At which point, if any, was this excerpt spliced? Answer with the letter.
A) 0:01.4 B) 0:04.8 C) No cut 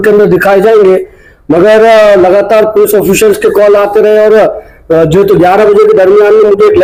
C